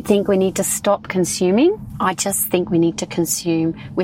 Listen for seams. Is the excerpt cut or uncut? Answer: cut